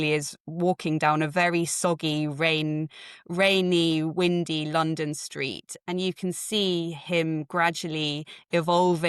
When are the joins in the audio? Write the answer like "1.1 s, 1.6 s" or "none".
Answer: none